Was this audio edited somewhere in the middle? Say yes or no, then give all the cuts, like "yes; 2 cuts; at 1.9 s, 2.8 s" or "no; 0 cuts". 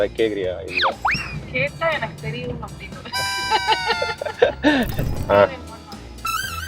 yes; 1 cut; at 5.0 s